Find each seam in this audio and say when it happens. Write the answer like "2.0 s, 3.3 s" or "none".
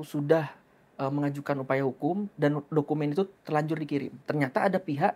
4.2 s